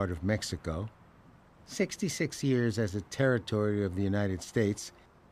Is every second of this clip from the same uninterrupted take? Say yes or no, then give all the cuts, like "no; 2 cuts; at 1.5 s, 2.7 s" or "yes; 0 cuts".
yes; 0 cuts